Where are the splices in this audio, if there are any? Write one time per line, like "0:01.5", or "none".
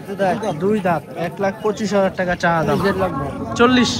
0:02.7